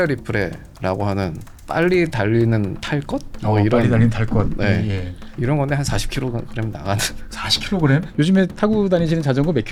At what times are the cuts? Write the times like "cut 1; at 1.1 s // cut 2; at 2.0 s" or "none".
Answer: none

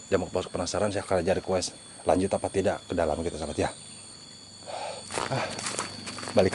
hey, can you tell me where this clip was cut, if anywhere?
cut 1; at 5.0 s

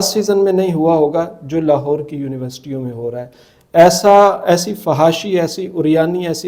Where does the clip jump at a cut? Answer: none

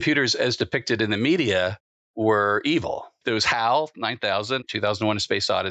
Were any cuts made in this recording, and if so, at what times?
cut 1; at 4.6 s

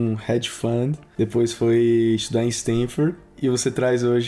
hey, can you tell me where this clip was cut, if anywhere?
cut 1; at 1.0 s

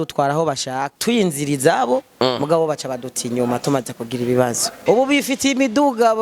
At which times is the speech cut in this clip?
cut 1; at 0.9 s // cut 2; at 4.8 s

